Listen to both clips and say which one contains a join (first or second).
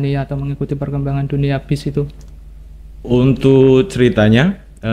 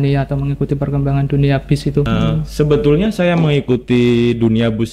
second